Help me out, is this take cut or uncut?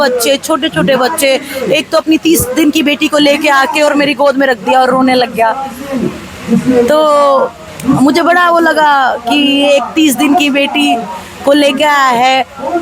uncut